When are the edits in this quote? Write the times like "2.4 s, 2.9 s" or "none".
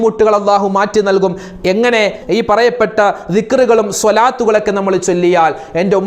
2.2 s